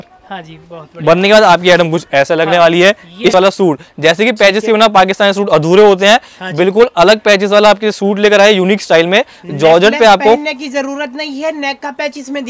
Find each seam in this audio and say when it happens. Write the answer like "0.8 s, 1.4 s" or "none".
3.3 s

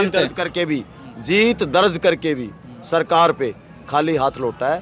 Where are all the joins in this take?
none

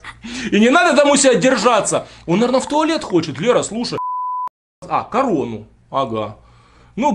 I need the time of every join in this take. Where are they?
4.3 s

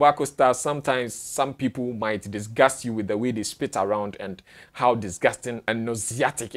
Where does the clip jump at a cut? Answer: 5.6 s

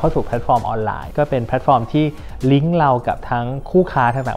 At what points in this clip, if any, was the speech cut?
1.1 s

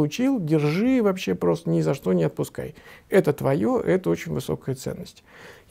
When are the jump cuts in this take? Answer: none

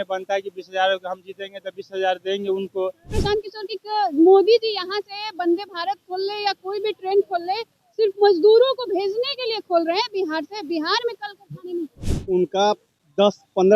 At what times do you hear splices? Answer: 3.1 s, 12.1 s

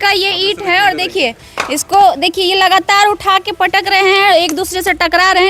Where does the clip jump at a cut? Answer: none

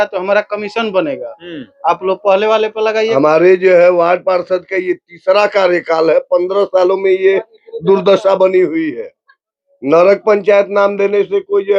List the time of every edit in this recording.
3.1 s

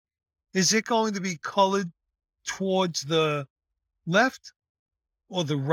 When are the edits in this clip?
none

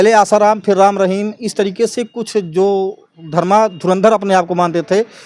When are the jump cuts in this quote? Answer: none

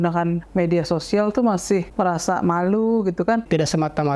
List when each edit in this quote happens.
1.9 s, 3.4 s

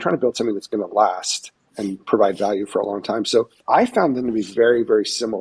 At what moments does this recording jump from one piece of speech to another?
1.7 s, 3.6 s

